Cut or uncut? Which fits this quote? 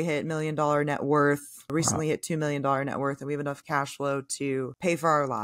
cut